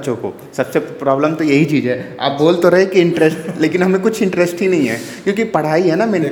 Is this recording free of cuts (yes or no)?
yes